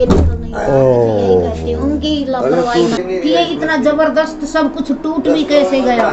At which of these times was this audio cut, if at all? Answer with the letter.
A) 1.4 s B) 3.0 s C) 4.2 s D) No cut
B